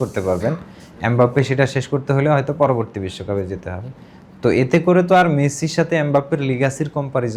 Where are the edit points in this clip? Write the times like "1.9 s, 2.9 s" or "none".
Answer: none